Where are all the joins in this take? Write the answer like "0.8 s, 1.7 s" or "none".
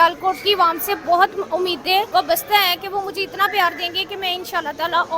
2.1 s